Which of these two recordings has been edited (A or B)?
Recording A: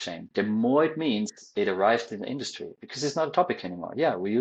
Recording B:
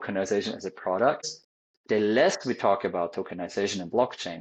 B